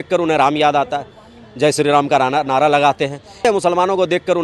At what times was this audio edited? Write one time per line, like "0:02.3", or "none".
0:03.4